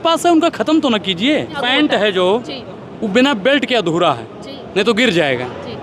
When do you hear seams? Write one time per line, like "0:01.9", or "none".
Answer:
0:01.6